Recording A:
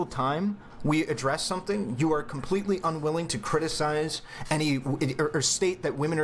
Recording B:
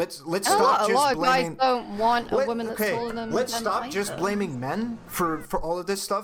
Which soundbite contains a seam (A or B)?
A